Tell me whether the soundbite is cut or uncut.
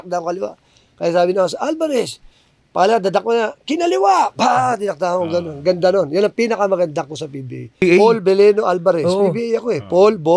cut